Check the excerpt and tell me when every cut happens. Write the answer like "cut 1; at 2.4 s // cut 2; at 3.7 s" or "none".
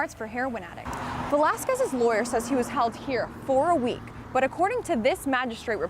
cut 1; at 1.1 s